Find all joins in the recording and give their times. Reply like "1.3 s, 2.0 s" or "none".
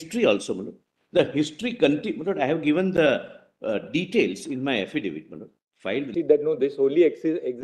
6.1 s